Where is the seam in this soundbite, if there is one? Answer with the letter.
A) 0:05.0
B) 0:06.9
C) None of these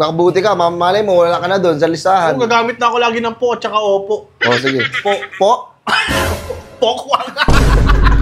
C